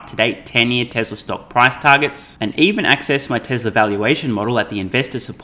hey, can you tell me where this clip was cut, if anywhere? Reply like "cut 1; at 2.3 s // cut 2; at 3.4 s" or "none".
none